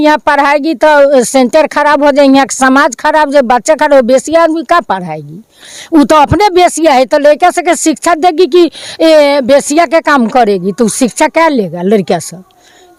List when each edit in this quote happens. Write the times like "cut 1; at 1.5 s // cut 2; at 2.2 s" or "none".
none

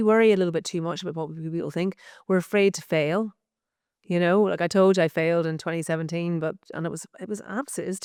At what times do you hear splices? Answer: none

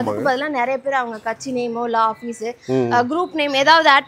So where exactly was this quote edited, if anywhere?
none

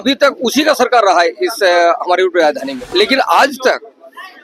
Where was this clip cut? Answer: cut 1; at 2.8 s

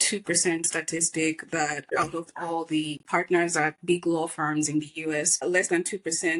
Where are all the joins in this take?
none

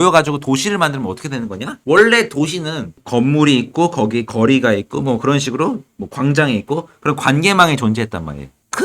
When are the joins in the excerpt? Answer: cut 1; at 1.8 s

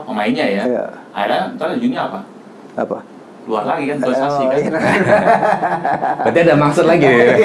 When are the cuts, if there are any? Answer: none

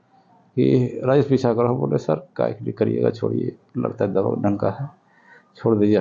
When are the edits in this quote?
none

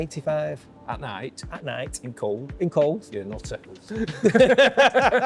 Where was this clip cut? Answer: none

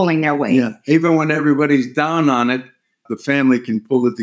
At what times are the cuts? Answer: cut 1; at 3.0 s

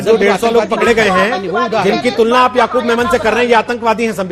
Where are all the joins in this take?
none

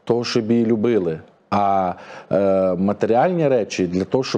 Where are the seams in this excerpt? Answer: none

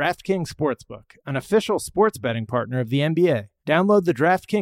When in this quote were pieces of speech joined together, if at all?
cut 1; at 3.5 s

